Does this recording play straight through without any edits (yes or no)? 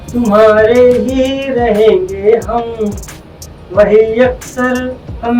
yes